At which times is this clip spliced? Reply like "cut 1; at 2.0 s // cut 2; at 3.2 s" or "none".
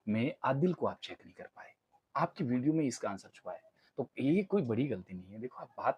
none